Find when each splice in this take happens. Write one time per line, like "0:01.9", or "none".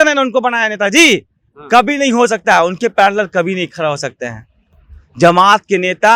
none